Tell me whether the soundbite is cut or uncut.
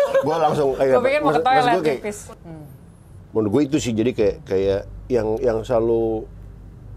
cut